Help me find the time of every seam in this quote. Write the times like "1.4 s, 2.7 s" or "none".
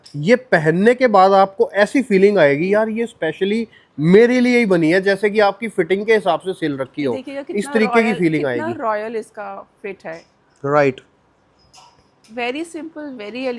none